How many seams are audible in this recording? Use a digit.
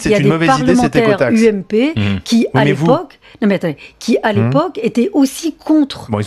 1